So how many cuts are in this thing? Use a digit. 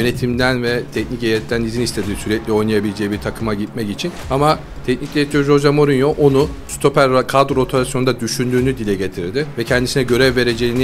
0